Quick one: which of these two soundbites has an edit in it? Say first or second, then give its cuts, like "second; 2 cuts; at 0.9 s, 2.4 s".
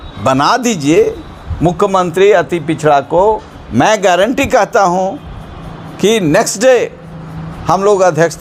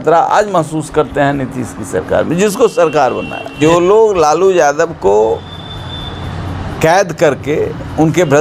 second; 1 cut; at 3.5 s